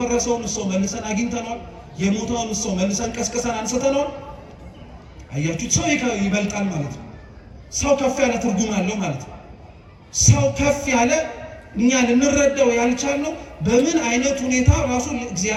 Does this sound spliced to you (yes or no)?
no